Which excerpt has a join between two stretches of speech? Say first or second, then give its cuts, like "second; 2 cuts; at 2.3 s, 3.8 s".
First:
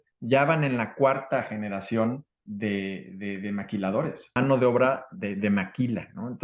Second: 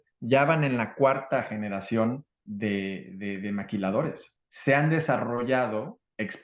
second; 1 cut; at 4.2 s